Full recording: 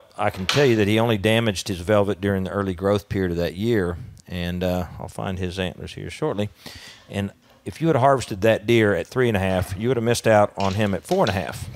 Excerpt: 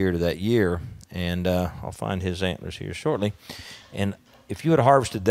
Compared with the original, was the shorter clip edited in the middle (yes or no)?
no